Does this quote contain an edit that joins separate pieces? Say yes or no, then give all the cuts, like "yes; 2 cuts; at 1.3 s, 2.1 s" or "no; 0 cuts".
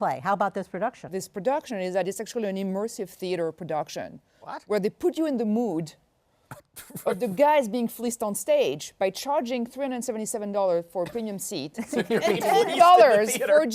yes; 1 cut; at 1.2 s